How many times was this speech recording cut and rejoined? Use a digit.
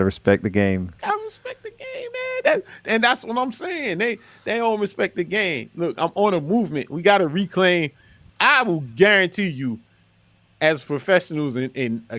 1